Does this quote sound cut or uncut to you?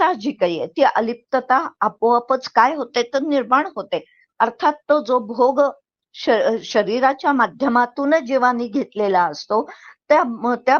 uncut